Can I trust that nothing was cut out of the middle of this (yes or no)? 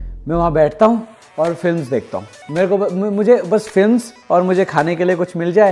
yes